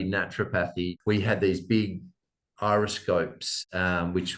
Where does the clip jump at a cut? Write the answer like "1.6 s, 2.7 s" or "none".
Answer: 1.0 s